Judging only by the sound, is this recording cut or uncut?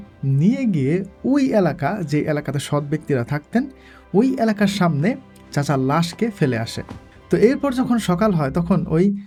uncut